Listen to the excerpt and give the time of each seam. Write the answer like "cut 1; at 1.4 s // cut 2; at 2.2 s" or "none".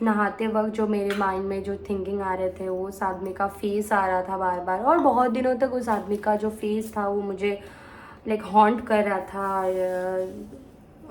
none